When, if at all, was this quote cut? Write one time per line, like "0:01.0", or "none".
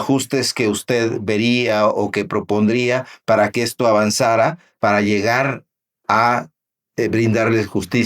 0:04.7

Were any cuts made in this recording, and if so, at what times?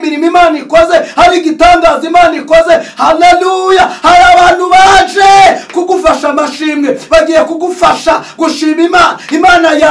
none

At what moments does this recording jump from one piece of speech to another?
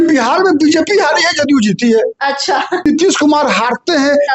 0:02.9

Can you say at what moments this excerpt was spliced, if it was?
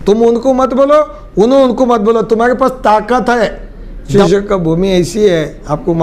0:04.1

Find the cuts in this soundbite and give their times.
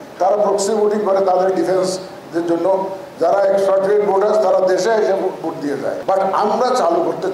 0:06.0

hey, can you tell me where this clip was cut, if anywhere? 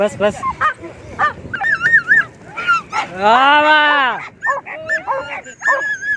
0:01.6

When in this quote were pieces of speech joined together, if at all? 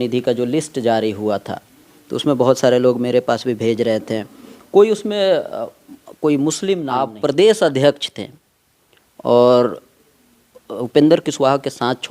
0:07.1

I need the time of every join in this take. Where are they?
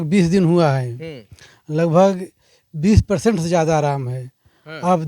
none

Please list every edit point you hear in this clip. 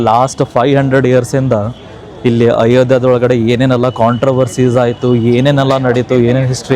none

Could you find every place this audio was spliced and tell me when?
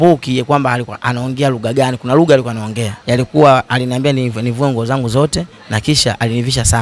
0:02.9

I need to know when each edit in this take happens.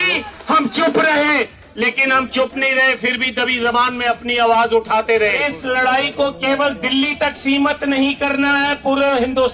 0:05.5

